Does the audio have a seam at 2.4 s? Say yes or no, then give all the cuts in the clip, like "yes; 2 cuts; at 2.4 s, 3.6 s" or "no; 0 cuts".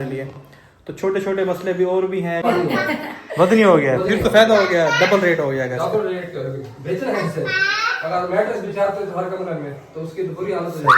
yes; 1 cut; at 2.4 s